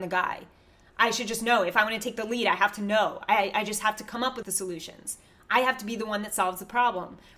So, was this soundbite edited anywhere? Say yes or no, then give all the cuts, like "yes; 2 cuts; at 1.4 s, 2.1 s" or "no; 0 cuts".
yes; 1 cut; at 4.5 s